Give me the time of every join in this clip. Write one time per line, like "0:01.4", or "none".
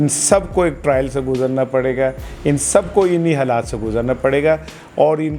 none